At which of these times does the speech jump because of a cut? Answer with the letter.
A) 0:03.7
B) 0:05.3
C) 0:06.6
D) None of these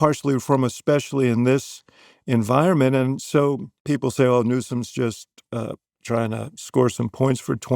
A